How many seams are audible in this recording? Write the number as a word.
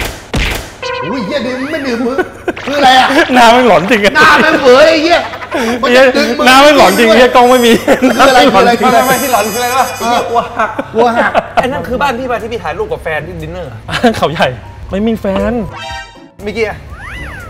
one